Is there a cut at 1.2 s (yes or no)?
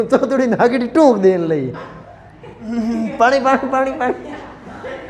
no